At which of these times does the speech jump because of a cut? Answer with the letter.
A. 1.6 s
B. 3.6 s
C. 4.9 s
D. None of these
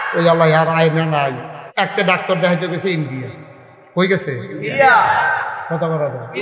A